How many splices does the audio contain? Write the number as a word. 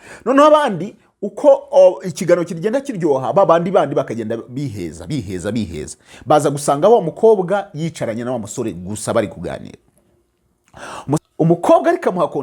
one